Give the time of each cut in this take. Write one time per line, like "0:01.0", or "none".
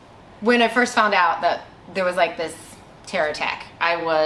none